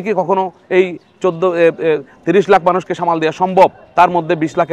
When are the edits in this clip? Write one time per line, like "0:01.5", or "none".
none

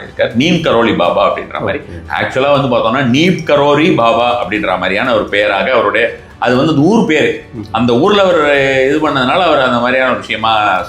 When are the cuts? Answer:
none

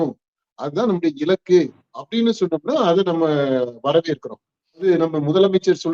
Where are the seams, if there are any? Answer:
0:04.8

